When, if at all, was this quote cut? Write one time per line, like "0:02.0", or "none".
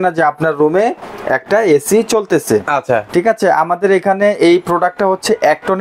none